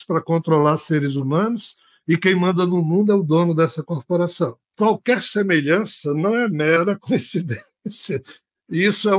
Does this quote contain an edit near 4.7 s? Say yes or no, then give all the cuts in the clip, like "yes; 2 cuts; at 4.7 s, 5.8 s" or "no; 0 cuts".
no; 0 cuts